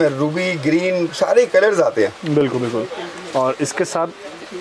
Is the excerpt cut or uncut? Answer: uncut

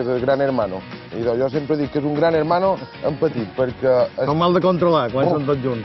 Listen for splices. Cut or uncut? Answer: uncut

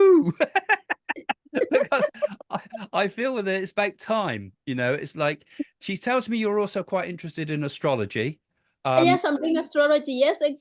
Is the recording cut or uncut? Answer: uncut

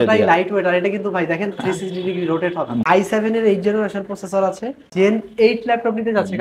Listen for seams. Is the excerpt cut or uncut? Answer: cut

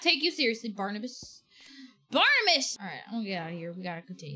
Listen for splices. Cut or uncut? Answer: cut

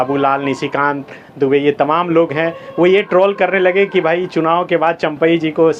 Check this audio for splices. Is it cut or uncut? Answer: uncut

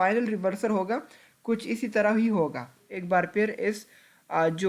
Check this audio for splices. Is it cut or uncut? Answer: cut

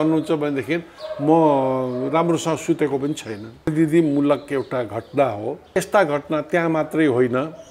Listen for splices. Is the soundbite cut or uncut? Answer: cut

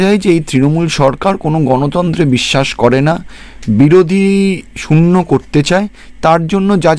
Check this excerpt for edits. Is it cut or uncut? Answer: uncut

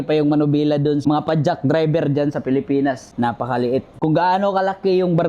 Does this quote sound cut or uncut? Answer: cut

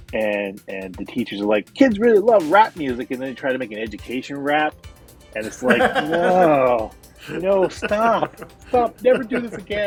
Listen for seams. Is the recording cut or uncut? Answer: uncut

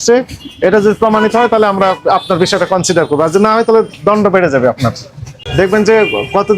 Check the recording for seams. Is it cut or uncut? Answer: cut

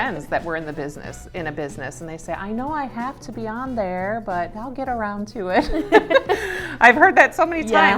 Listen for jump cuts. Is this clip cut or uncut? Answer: uncut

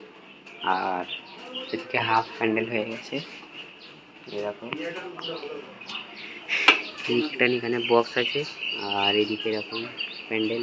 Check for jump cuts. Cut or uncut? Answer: uncut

